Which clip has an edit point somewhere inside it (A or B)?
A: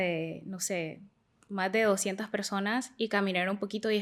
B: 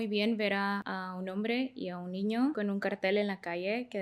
B